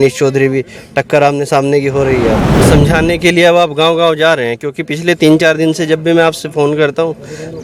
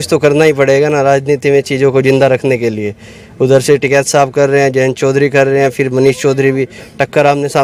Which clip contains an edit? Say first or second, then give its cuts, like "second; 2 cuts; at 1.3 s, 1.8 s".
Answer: first; 1 cut; at 2.5 s